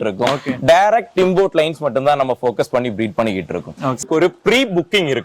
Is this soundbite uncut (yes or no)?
no